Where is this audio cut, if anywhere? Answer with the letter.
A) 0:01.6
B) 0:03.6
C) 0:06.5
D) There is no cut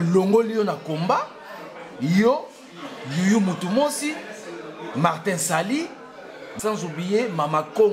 C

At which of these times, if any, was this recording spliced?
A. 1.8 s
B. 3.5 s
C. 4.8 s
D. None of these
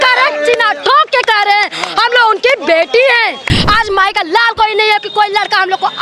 B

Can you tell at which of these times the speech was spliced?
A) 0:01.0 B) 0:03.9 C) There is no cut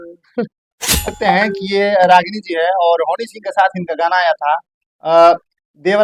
A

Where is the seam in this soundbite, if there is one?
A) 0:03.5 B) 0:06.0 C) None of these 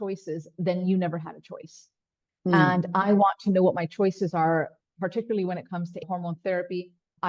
B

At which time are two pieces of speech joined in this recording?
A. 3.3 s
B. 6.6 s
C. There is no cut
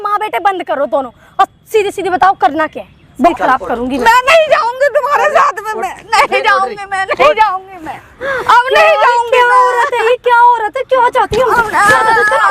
A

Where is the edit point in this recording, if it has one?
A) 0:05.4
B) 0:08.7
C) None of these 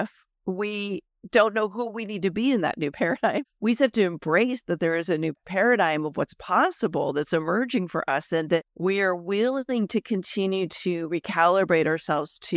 C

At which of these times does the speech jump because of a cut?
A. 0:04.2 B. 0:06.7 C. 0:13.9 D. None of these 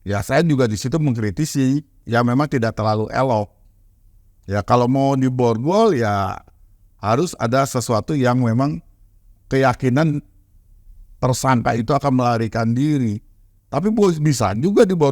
D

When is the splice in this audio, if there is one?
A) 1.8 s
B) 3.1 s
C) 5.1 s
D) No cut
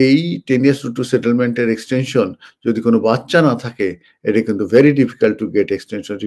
D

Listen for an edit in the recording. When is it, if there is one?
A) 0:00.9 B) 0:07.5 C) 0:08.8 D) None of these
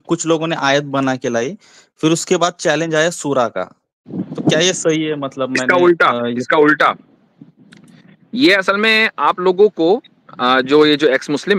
D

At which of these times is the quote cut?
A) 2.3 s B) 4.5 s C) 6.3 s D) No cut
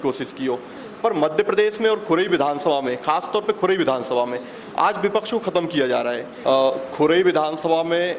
C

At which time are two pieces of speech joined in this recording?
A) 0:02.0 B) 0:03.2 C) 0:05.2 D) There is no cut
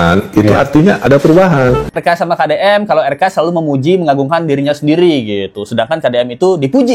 A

